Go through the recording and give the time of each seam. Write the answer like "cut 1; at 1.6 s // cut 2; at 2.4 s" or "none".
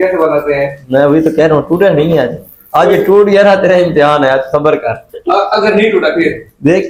none

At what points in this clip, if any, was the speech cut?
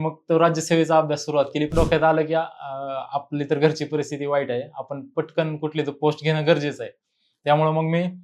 cut 1; at 1.7 s

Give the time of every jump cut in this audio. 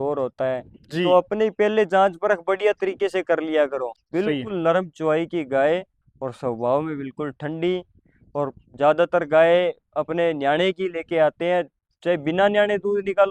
cut 1; at 3.9 s

